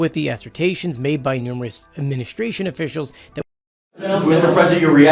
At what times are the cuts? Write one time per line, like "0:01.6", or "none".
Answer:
0:03.4